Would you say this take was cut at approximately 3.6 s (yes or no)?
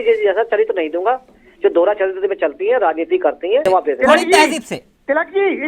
yes